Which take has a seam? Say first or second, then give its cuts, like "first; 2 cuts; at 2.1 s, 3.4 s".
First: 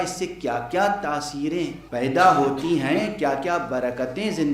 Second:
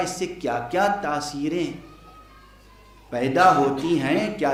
first; 1 cut; at 1.8 s